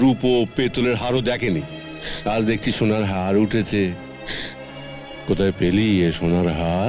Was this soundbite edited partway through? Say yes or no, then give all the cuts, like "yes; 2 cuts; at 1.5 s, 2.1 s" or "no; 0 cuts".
no; 0 cuts